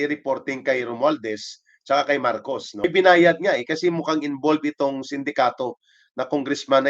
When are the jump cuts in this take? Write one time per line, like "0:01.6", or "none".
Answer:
0:02.8